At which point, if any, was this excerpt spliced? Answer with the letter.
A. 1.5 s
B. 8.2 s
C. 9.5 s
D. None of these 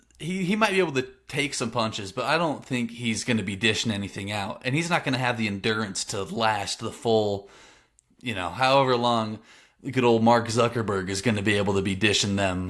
D